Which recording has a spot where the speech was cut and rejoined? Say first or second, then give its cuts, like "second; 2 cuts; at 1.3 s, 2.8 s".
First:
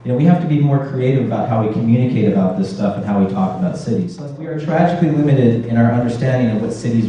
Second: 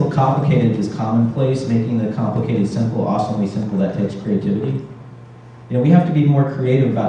first; 1 cut; at 4.5 s